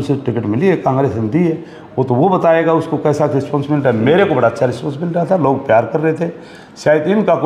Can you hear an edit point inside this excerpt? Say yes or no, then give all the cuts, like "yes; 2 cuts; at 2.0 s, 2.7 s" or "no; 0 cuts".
no; 0 cuts